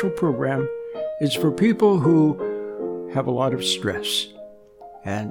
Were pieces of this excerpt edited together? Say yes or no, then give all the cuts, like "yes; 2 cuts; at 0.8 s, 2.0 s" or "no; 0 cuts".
no; 0 cuts